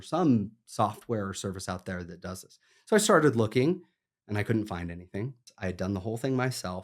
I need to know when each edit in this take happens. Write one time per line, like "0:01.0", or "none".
0:05.4